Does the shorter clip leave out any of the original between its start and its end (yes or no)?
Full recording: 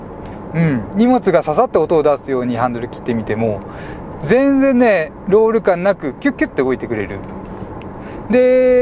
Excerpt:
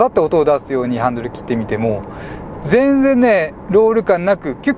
no